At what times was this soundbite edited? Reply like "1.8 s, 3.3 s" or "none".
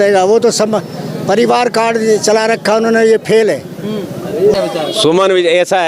4.5 s